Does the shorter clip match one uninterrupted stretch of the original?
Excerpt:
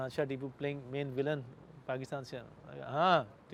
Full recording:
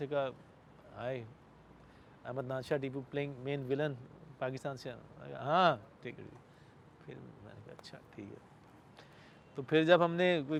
yes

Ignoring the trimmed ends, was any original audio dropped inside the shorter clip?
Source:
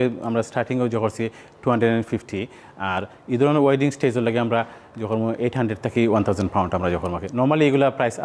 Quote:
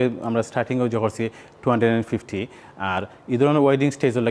no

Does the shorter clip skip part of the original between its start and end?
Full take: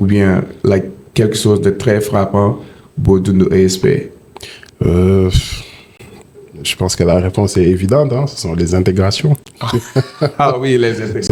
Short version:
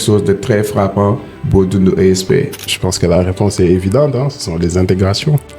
yes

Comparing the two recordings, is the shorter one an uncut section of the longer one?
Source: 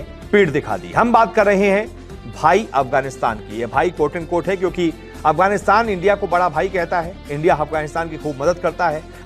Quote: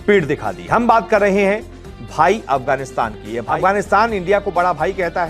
no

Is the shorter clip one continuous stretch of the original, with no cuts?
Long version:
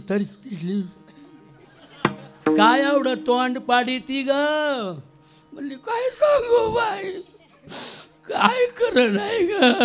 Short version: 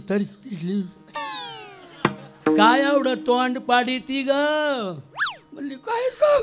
yes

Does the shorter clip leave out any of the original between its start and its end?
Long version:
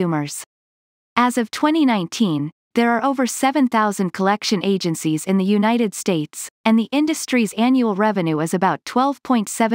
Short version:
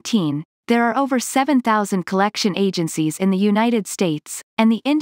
no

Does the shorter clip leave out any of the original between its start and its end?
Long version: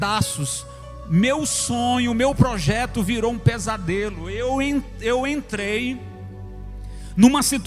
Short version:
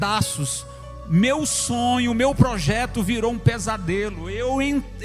no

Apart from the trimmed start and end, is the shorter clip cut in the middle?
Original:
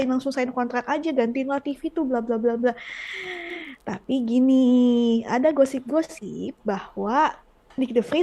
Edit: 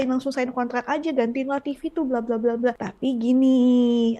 yes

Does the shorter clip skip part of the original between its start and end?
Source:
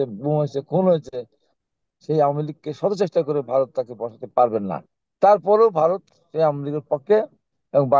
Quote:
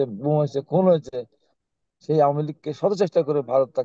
no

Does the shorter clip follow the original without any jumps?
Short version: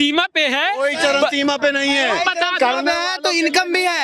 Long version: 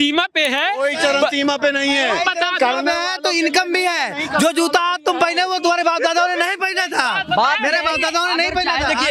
yes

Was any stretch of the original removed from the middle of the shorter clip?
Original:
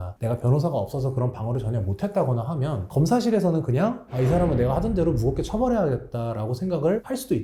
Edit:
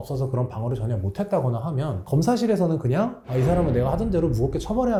no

